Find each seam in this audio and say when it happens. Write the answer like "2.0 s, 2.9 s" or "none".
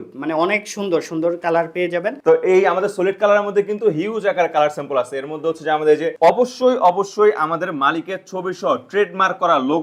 2.2 s, 6.1 s